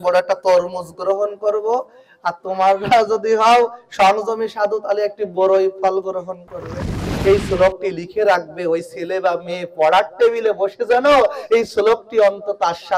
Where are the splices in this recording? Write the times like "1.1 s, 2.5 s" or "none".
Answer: 7.1 s